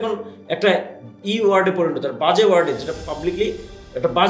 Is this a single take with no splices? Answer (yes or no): yes